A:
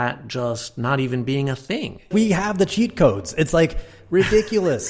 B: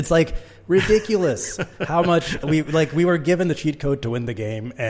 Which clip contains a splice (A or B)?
A